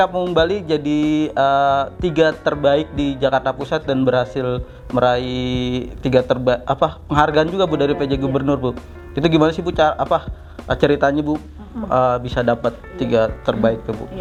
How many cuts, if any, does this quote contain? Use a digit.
0